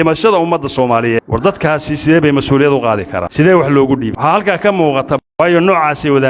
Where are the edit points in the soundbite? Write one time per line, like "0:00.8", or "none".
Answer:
0:01.2
0:03.2
0:04.1
0:05.2